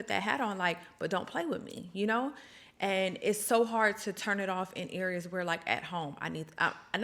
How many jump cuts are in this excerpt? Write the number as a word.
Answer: zero